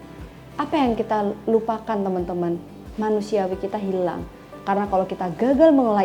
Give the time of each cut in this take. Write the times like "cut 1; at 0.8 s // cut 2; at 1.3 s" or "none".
cut 1; at 4.5 s